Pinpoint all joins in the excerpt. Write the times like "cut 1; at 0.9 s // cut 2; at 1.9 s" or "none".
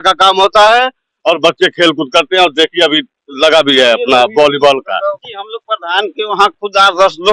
cut 1; at 5.2 s